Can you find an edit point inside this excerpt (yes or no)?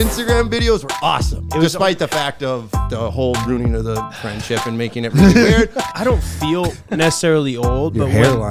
yes